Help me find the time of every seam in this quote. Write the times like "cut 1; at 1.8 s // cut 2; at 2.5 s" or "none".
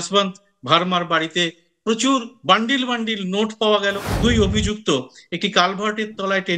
cut 1; at 4.1 s